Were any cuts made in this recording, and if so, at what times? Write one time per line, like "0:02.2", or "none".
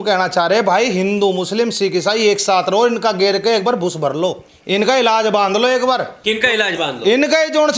0:04.5
0:06.1